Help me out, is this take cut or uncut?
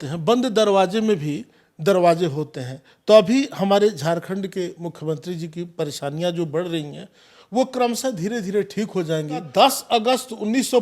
cut